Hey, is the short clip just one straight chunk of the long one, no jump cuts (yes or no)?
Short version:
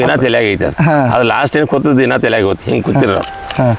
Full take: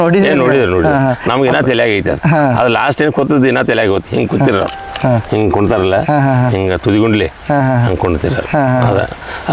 yes